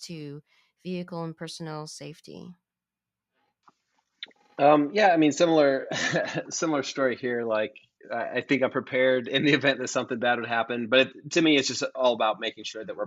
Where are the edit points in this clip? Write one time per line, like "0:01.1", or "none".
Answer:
none